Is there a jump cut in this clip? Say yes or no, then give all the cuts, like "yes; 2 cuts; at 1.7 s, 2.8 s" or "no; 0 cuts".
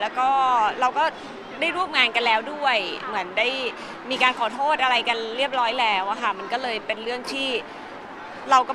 no; 0 cuts